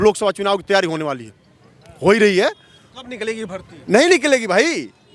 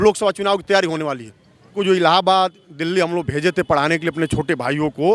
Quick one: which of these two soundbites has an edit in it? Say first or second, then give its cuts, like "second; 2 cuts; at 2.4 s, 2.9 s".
second; 1 cut; at 1.8 s